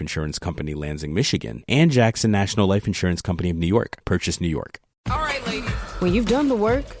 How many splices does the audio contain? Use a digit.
1